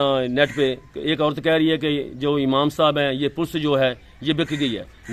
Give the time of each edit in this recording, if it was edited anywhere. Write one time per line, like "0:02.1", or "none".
none

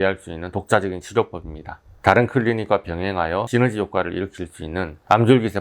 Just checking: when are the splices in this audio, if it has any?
0:01.9

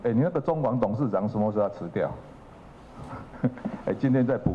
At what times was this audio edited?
none

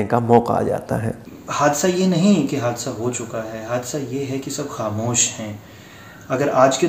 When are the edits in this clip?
0:01.3

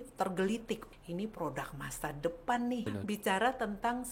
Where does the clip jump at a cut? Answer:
0:00.9
0:02.9

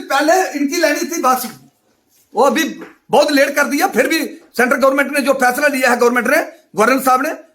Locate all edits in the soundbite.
none

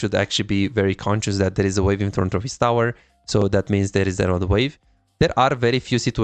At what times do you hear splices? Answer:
none

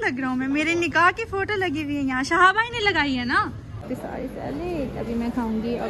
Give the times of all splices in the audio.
0:03.8

